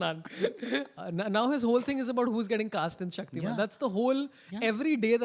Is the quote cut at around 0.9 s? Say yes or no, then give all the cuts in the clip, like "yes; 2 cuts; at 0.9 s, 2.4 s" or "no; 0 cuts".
yes; 1 cut; at 0.9 s